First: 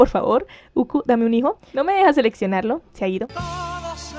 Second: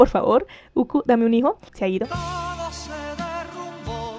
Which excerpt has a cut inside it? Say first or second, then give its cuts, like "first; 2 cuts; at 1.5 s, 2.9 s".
second; 1 cut; at 1.7 s